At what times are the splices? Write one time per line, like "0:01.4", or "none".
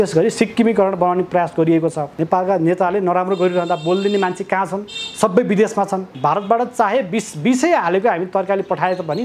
0:02.1
0:06.1